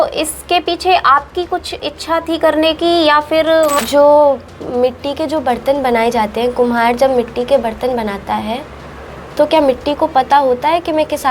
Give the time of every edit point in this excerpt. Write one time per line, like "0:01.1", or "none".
0:03.8

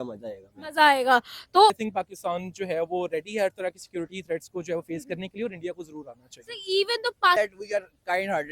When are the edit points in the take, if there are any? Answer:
0:01.8
0:07.4

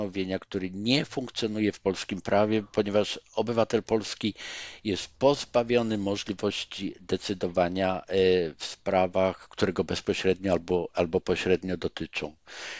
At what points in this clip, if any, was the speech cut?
none

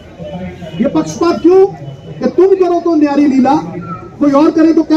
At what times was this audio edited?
none

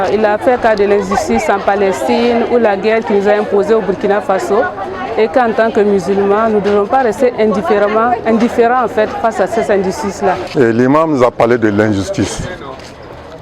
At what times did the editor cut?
0:10.5

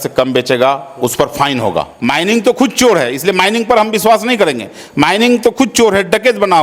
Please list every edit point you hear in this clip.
0:01.9

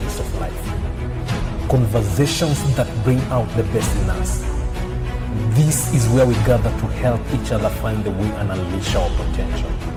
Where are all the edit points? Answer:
none

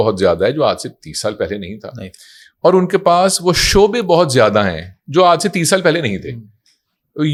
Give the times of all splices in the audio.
none

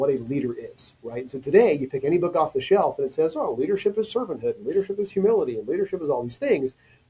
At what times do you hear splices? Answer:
none

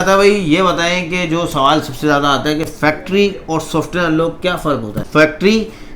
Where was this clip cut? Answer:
0:05.0

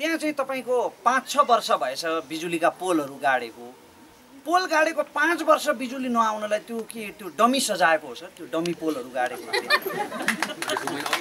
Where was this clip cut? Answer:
none

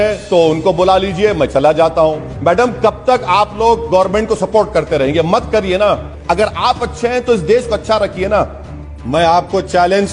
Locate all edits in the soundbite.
0:02.3
0:06.1
0:08.9

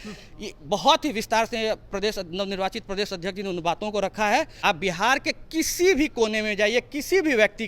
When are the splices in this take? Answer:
0:04.5

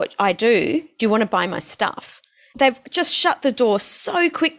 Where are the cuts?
0:02.5

